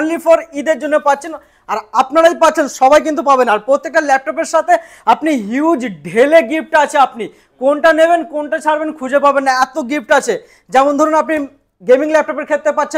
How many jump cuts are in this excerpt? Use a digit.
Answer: 0